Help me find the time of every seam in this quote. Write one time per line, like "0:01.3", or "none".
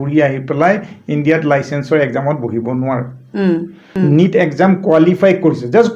0:03.8